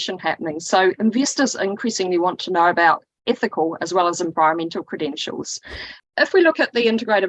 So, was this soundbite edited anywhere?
yes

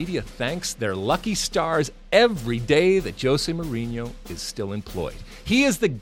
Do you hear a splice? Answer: no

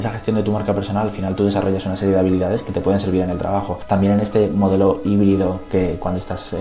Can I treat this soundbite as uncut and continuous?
no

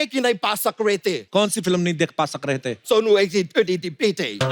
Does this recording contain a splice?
yes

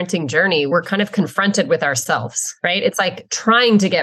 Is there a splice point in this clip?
yes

